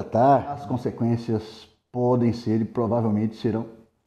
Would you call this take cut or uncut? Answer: uncut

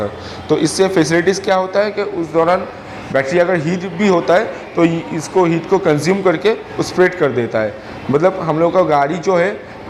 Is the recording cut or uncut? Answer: uncut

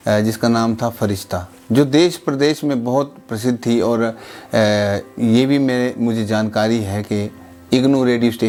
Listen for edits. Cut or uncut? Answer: uncut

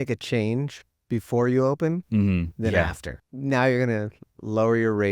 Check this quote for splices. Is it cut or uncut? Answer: cut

